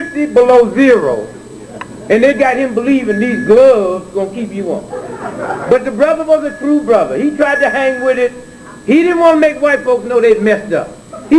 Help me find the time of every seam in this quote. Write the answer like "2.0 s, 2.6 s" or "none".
1.6 s